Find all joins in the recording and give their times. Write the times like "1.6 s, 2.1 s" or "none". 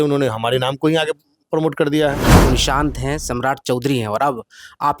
2.4 s